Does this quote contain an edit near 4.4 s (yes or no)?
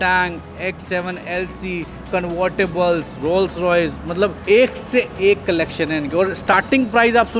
yes